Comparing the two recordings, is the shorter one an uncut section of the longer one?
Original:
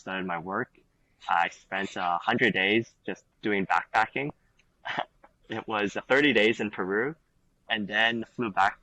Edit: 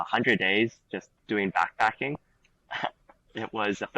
yes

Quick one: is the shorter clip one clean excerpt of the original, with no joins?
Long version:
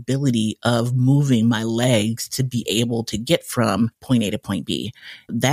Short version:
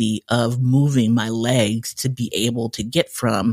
yes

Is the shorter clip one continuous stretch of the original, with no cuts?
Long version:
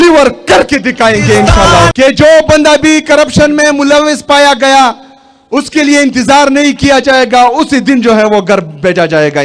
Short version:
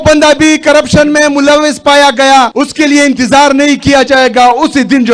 no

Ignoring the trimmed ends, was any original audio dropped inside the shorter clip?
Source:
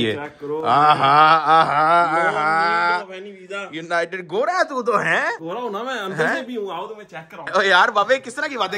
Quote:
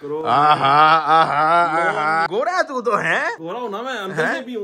yes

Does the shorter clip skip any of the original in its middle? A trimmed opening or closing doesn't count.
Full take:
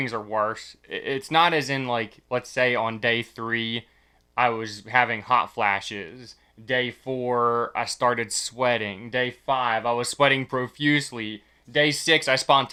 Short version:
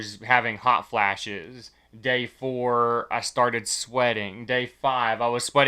no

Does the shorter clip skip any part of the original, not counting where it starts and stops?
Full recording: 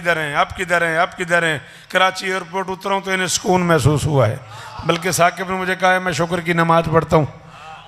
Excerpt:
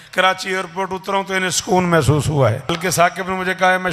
yes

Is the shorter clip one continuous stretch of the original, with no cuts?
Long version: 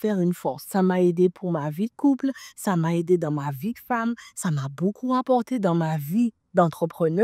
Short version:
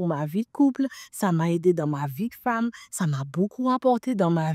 yes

